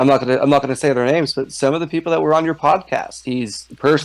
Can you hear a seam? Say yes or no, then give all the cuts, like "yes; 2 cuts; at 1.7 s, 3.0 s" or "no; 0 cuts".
no; 0 cuts